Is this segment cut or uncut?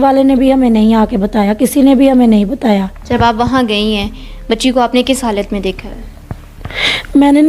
cut